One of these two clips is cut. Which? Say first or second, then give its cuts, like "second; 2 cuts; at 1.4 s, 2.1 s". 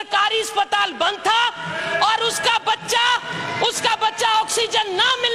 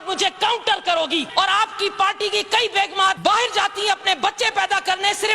second; 2 cuts; at 1.3 s, 3.2 s